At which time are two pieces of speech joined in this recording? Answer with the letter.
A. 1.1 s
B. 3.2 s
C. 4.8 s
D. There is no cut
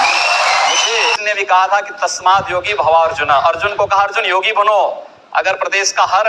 A